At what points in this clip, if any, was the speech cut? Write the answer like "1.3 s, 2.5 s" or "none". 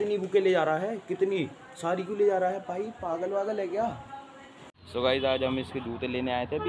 4.8 s

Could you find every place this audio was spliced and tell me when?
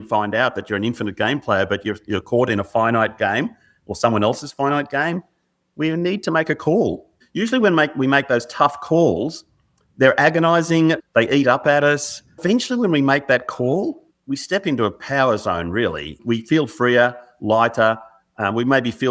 7.2 s, 11.0 s, 12.4 s, 14.1 s, 16.2 s

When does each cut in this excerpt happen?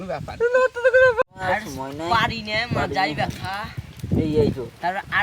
1.2 s

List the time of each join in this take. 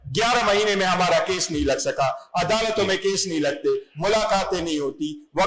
none

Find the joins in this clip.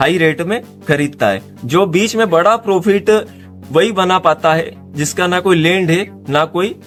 none

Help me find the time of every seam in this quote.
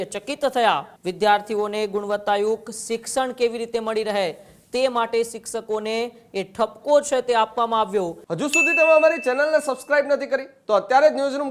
1.0 s, 8.2 s

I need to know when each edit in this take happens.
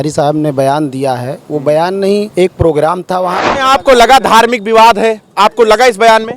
2.3 s, 3.4 s

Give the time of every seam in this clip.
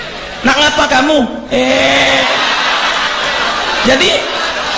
none

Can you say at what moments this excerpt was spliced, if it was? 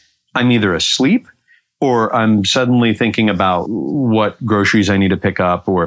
3.6 s

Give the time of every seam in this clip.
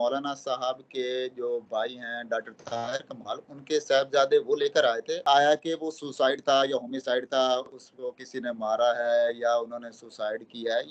5.2 s

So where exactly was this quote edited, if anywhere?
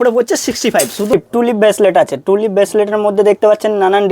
1.1 s

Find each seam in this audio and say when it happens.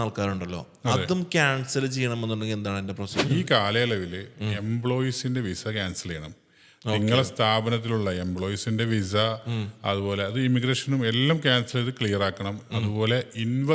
3.1 s

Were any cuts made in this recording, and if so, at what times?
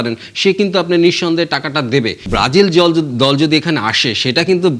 2.2 s

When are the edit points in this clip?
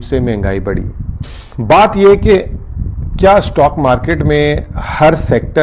1.2 s

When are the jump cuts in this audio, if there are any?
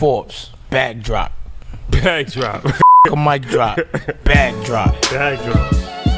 none

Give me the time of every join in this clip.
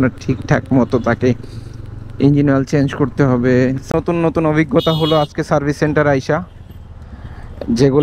3.8 s

